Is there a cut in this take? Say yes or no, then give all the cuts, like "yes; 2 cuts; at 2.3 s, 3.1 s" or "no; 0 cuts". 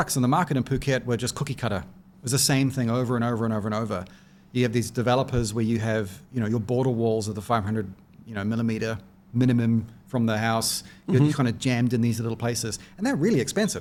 no; 0 cuts